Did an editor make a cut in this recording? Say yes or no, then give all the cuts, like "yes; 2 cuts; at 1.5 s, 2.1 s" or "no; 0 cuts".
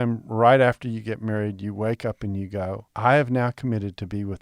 yes; 1 cut; at 2.9 s